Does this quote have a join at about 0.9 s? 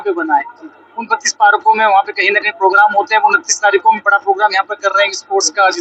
no; 0 cuts

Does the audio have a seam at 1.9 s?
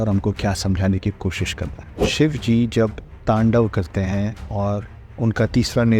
yes; 1 cut; at 1.9 s

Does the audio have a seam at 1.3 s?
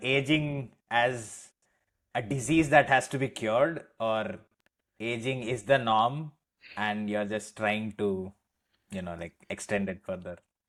no; 0 cuts

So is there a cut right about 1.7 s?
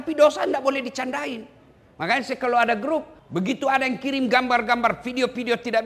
no; 1 cut; at 3.2 s

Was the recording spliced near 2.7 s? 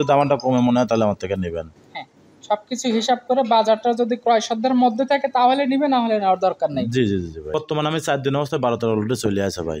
no; 1 cut; at 7.5 s

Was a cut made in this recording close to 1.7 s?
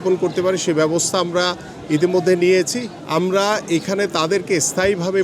no; 1 cut; at 2.9 s

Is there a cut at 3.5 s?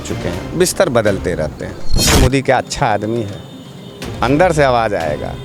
no; 1 cut; at 2.2 s

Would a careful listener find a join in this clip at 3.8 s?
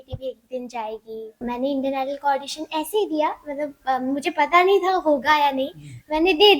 no; 1 cut; at 1.4 s

